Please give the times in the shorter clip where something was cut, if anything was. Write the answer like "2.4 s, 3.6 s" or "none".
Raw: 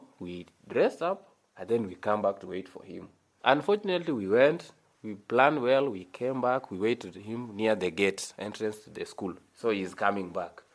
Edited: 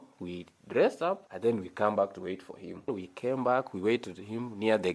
1.3 s, 3.0 s

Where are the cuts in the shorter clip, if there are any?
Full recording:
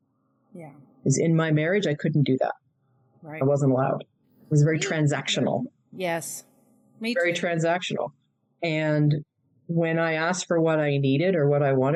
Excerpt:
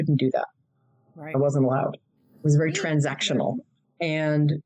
3.7 s

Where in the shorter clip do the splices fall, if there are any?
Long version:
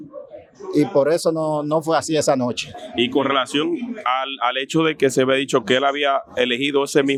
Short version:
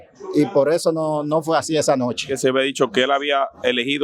2.3 s

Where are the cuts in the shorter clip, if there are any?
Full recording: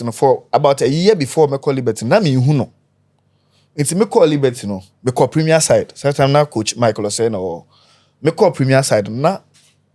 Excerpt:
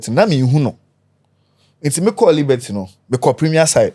none

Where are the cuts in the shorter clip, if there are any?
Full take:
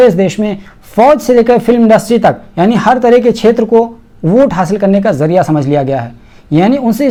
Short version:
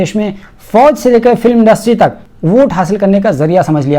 2.2 s

